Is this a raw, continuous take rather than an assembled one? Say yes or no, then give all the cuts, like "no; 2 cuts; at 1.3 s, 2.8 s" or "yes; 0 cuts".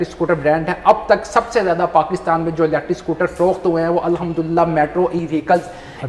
yes; 0 cuts